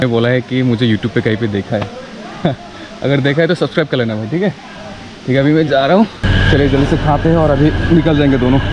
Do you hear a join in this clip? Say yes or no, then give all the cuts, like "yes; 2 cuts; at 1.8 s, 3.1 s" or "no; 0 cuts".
yes; 1 cut; at 6.2 s